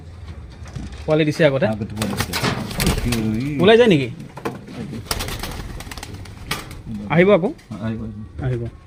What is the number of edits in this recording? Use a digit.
0